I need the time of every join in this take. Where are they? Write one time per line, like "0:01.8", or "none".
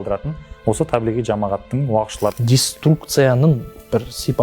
0:02.3

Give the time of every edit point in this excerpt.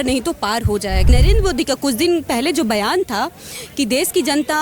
0:01.1

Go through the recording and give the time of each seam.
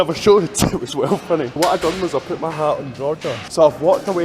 0:01.5
0:03.4

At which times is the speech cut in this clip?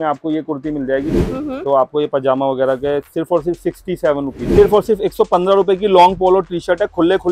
0:01.2
0:04.5

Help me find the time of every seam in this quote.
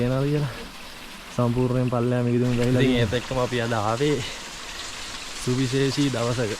0:03.0

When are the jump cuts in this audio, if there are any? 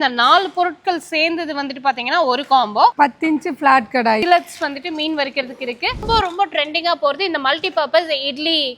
0:02.9
0:04.2
0:06.0

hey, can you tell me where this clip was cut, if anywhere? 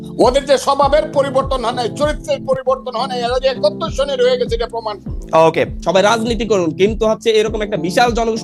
0:05.8

